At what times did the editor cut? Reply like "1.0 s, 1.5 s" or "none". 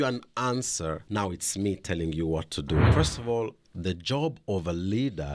1.0 s, 2.9 s